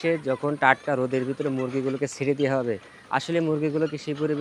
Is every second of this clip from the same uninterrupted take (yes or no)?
yes